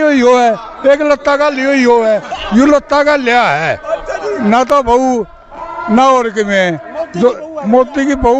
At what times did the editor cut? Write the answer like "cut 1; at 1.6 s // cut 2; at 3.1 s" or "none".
none

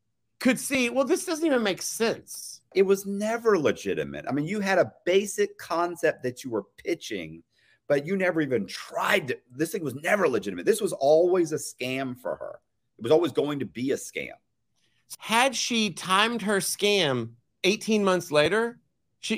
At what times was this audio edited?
cut 1; at 2.7 s // cut 2; at 15.0 s

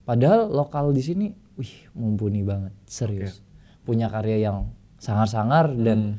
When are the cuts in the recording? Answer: none

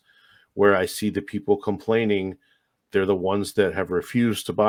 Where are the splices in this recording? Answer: none

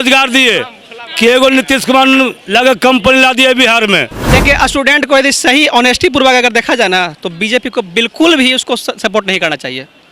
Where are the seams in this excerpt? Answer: cut 1; at 4.2 s

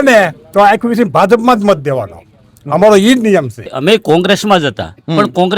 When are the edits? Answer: cut 1; at 3.7 s

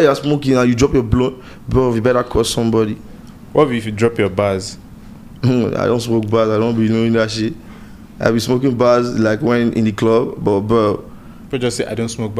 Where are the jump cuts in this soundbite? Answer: none

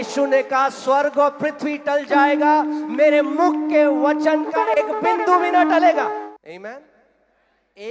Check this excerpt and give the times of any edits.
cut 1; at 6.2 s

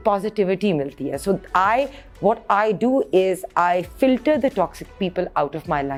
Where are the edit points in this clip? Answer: none

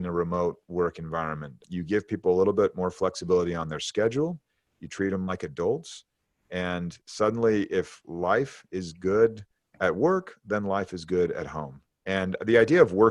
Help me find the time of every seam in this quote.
cut 1; at 1.6 s

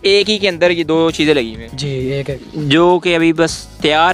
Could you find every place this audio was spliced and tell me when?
cut 1; at 2.5 s

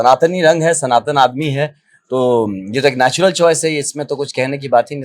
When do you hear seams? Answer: none

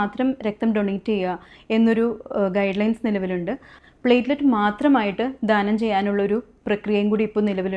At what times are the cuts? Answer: cut 1; at 3.7 s

